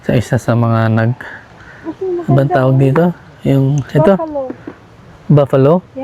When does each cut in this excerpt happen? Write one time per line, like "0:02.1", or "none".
none